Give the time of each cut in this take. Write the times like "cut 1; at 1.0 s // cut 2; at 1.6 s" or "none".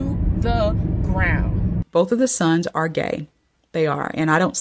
cut 1; at 1.9 s

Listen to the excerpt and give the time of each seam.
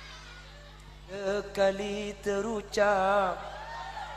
cut 1; at 1.2 s

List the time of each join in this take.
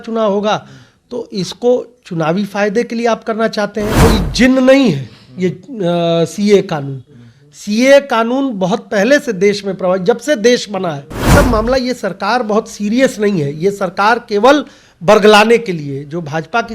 cut 1; at 4.0 s // cut 2; at 11.3 s

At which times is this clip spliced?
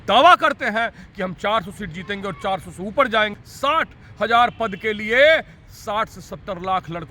cut 1; at 3.8 s

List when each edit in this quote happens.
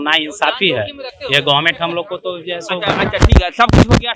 none

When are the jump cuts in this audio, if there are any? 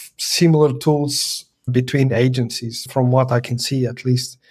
cut 1; at 1.6 s // cut 2; at 2.8 s

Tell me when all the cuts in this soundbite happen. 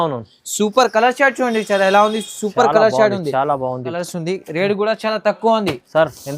cut 1; at 3.9 s

